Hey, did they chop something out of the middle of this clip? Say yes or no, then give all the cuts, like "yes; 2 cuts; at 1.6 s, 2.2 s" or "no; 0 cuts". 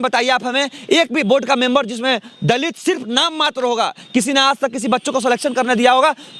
no; 0 cuts